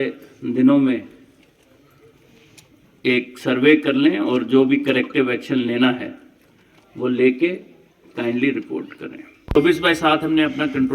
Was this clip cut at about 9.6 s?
yes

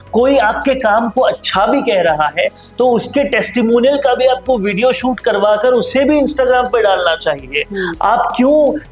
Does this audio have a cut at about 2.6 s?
no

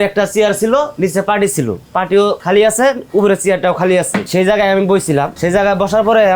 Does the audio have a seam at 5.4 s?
no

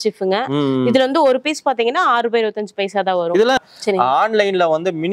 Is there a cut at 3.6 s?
yes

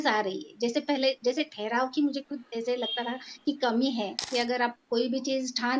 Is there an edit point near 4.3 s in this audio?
yes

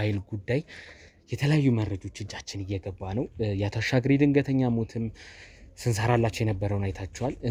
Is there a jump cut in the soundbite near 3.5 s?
no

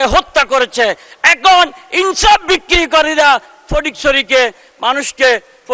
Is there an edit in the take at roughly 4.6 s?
no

